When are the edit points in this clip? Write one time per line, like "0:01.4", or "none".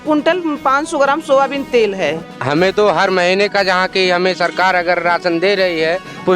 0:02.3